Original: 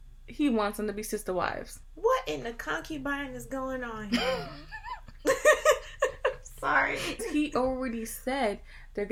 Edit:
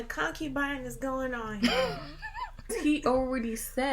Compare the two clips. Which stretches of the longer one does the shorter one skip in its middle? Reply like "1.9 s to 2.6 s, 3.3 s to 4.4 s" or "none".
5.1 s to 7.1 s